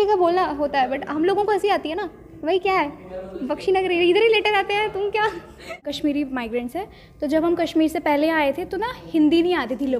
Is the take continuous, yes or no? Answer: no